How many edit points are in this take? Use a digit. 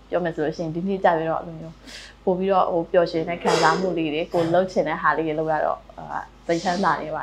0